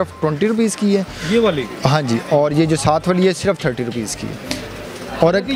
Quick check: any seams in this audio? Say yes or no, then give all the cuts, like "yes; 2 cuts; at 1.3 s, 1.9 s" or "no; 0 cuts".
no; 0 cuts